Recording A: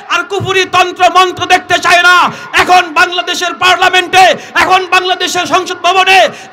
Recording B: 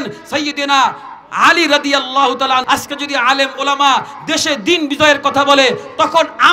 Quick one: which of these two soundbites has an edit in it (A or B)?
B